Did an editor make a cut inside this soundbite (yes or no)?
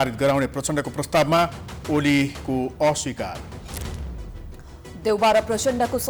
no